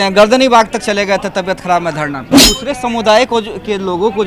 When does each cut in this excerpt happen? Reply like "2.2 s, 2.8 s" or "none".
2.2 s